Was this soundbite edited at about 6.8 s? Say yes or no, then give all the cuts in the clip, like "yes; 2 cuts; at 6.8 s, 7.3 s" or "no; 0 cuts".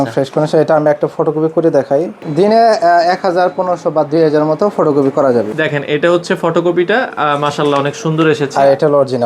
no; 2 cuts; at 2.1 s, 5.5 s